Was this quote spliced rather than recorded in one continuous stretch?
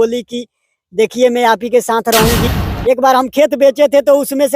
yes; 1 cut; at 2.5 s

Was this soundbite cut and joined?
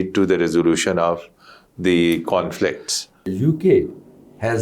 yes; 1 cut; at 3.4 s

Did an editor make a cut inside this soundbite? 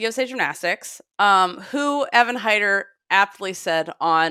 no; 0 cuts

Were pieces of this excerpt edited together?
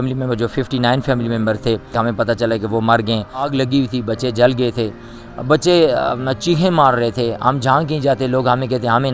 yes; 2 cuts; at 1.9 s, 3.5 s

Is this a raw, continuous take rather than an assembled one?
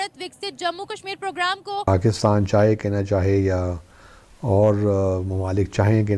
no; 1 cut; at 1.9 s

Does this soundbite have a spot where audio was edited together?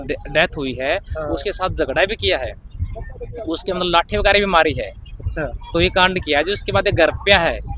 no; 0 cuts

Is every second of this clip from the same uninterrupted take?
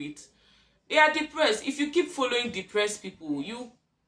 yes; 0 cuts

